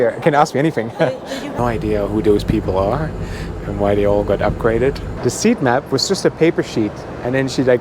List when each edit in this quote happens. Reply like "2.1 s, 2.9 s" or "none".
1.5 s, 5.1 s

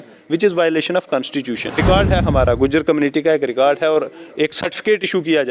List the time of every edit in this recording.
1.8 s

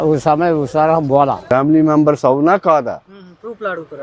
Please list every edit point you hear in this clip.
1.4 s

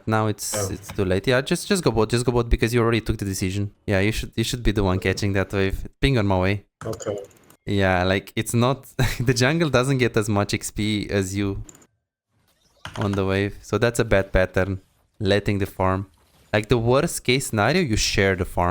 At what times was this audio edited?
3.7 s

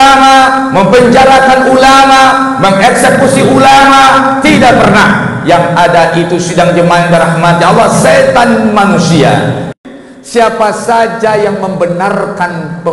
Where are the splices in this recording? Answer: 9.7 s

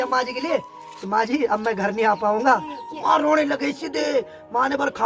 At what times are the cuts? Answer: none

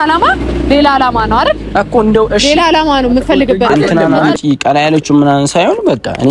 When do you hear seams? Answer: 4.2 s

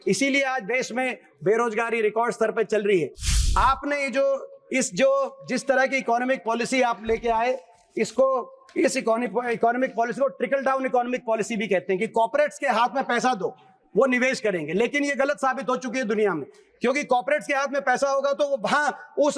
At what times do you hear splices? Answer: none

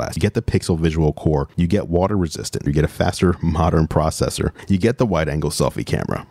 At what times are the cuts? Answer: 1.5 s

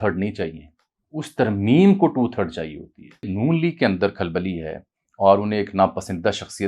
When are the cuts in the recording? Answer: 3.3 s

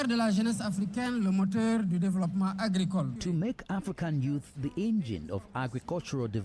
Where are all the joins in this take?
3.2 s

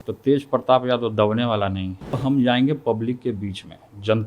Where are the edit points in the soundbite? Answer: 2.2 s

